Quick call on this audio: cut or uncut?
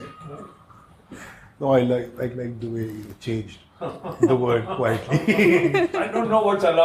uncut